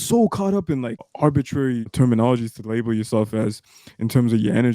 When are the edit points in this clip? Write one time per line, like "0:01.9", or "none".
0:01.1
0:01.9